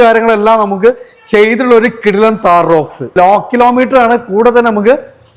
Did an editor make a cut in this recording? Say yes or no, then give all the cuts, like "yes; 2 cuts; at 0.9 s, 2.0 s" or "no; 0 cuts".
yes; 1 cut; at 3.1 s